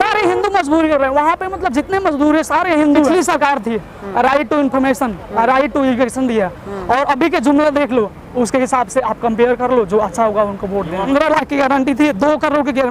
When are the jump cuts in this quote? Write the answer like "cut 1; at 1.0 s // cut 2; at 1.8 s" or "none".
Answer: cut 1; at 3.1 s // cut 2; at 11.1 s